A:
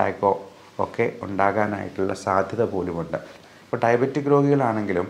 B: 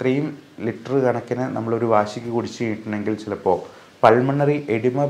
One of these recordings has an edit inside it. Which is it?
A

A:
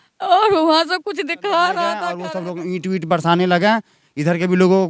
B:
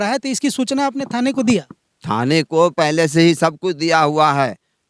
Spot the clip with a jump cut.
A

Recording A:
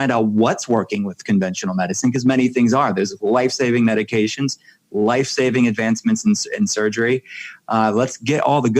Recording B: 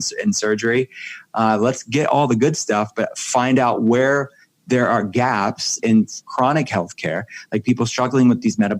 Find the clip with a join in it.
B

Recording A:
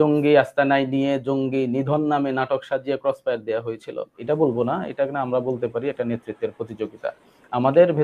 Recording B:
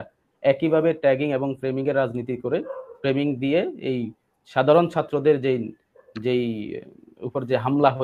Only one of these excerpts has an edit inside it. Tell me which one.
A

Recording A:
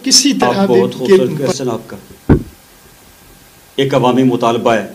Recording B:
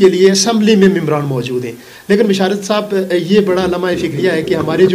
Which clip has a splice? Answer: A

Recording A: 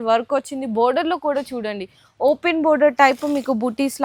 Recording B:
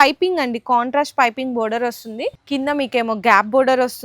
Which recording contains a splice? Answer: B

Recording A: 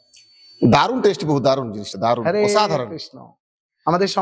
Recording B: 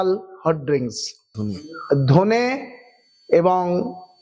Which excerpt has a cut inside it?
B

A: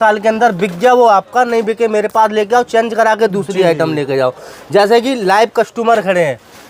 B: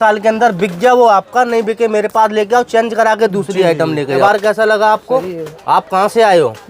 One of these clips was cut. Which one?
B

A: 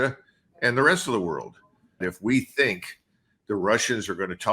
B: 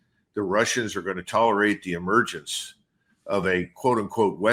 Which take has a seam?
A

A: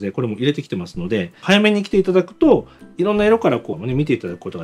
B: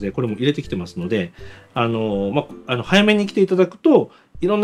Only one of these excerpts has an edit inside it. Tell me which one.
A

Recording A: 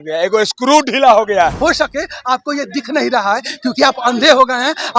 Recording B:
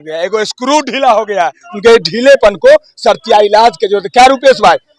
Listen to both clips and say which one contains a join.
A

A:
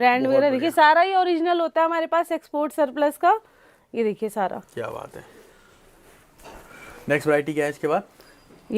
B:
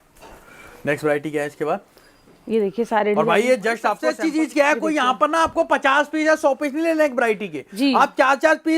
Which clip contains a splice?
B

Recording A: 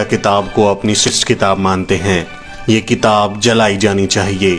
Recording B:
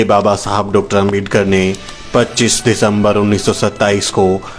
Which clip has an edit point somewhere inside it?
A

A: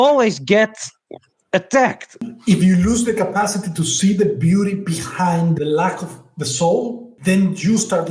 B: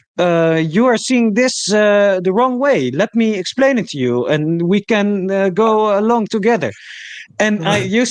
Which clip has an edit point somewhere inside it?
A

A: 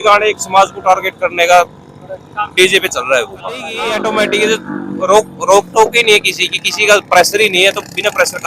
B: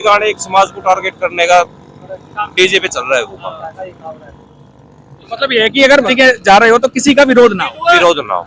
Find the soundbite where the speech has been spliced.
A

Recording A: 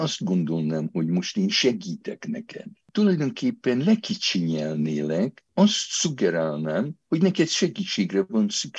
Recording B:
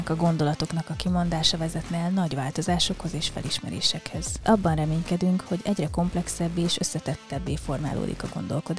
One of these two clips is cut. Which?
A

